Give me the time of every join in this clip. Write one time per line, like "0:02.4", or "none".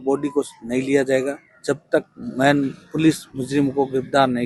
none